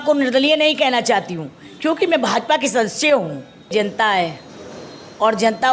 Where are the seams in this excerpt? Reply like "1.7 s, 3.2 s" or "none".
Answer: 3.7 s